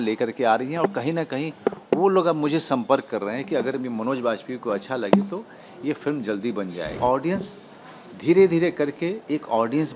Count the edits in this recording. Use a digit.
1